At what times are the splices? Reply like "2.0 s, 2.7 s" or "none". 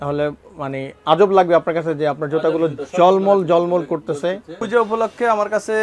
4.6 s